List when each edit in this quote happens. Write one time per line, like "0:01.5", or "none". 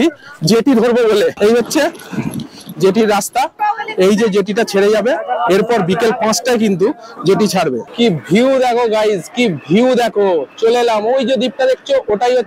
0:01.4
0:03.5
0:07.8